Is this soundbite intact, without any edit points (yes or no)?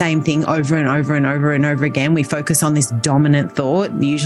yes